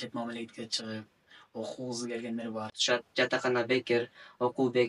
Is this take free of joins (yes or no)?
no